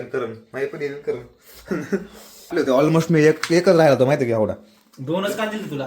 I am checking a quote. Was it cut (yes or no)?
yes